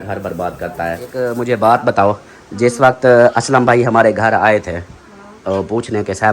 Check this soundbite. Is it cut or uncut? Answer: cut